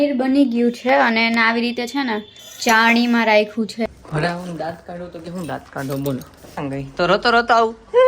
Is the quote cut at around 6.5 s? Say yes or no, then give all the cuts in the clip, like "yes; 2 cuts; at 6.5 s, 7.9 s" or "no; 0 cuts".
no; 1 cut; at 3.8 s